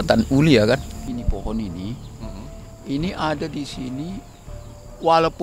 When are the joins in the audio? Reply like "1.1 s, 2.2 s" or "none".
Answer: 0.9 s